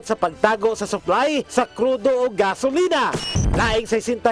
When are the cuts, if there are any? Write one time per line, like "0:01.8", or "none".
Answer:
0:03.3